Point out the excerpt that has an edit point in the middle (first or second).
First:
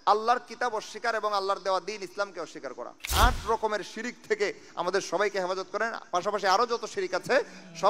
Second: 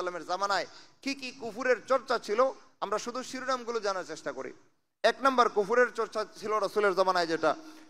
first